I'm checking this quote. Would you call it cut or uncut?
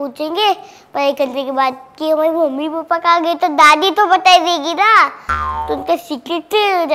uncut